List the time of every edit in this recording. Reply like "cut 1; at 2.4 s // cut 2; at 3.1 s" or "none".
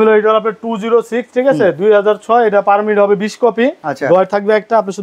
cut 1; at 3.9 s